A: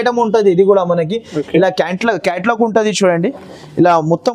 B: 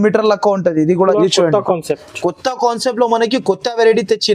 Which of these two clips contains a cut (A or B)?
B